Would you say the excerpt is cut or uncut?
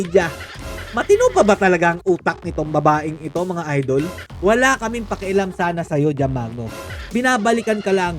cut